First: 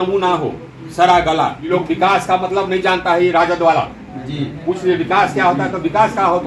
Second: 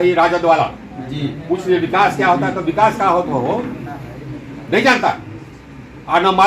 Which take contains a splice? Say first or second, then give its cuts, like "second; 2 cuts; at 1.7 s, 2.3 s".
first; 1 cut; at 1.6 s